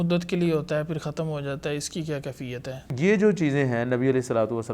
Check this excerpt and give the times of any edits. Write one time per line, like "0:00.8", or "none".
0:02.9